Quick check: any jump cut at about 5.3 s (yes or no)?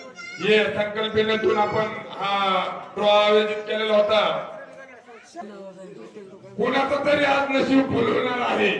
yes